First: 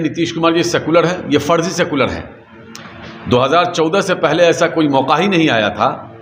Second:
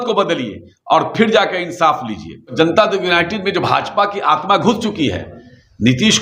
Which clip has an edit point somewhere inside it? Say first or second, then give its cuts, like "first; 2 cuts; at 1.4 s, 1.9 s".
second; 1 cut; at 2.4 s